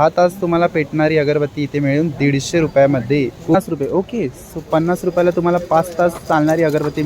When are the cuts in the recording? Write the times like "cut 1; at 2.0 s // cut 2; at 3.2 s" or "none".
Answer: cut 1; at 3.5 s